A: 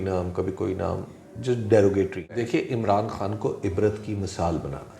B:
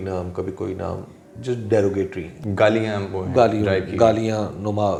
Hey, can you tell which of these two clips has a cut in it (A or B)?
A